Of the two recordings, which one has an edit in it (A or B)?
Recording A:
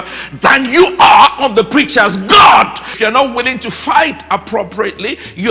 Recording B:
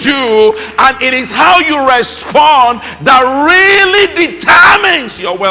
A